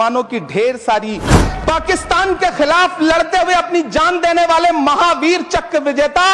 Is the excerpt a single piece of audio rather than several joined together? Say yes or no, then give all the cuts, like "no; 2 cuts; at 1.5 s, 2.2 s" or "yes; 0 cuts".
no; 1 cut; at 1.4 s